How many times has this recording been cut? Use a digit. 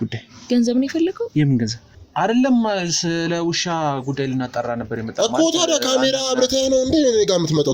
1